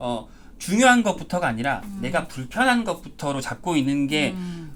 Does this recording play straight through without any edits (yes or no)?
yes